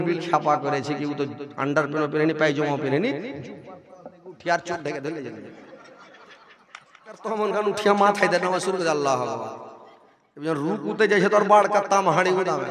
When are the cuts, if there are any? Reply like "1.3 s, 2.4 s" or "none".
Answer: 7.3 s